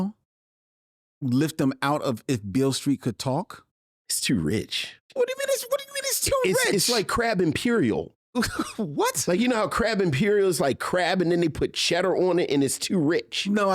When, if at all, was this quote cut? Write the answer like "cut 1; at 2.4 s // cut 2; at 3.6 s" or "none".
cut 1; at 5.0 s